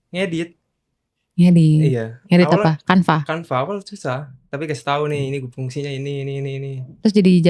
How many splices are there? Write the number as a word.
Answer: zero